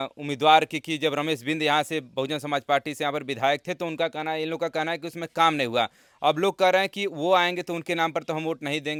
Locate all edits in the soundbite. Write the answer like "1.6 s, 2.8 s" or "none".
none